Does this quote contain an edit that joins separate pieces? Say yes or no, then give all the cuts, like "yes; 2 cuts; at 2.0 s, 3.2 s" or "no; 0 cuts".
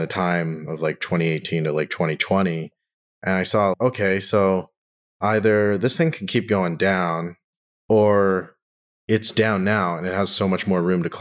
yes; 1 cut; at 3.8 s